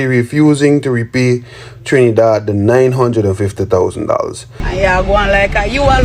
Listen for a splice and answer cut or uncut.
cut